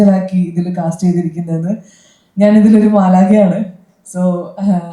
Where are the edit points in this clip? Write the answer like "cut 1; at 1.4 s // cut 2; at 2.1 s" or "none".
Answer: none